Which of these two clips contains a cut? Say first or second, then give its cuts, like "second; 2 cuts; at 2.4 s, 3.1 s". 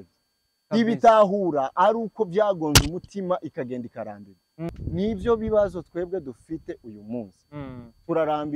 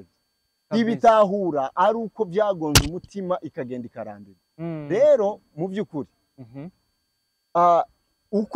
first; 1 cut; at 4.8 s